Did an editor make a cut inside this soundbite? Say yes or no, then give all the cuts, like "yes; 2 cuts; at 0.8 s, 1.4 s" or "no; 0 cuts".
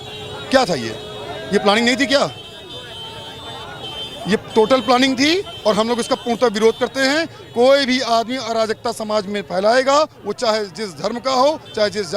no; 0 cuts